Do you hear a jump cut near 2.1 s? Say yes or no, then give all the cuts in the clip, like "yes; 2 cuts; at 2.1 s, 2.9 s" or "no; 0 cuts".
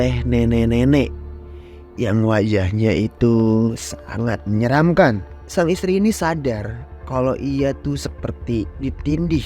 no; 1 cut; at 5.3 s